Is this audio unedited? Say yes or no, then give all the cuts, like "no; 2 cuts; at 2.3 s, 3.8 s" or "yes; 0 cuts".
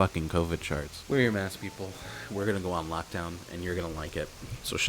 no; 1 cut; at 0.9 s